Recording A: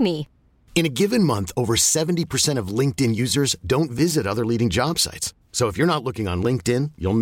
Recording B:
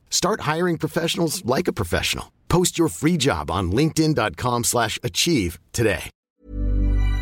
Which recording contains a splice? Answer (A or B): B